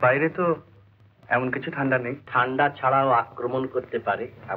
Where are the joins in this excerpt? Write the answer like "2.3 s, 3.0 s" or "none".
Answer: 2.2 s

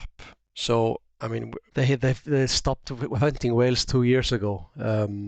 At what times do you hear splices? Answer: 1.6 s

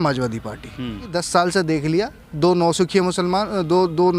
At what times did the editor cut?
1.1 s

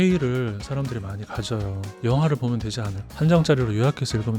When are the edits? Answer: 3.1 s

